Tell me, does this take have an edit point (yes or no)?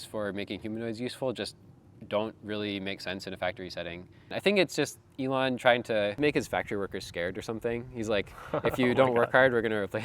yes